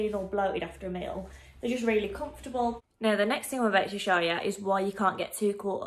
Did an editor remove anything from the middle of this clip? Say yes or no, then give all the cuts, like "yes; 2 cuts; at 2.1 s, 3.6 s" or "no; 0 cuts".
yes; 1 cut; at 2.8 s